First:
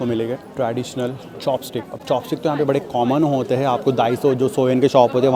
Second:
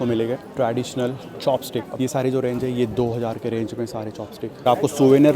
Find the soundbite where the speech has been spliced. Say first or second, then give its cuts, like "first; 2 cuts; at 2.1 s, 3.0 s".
second; 2 cuts; at 1.9 s, 4.6 s